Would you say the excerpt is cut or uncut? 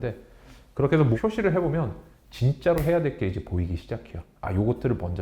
cut